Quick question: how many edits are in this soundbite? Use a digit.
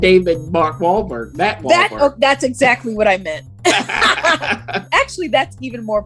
1